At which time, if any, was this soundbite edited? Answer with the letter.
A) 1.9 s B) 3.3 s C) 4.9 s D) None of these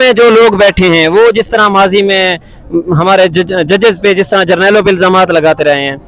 D